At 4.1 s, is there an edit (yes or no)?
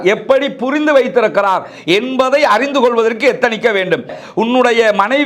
yes